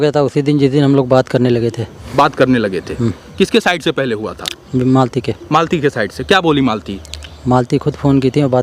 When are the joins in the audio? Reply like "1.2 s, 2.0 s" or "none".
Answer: none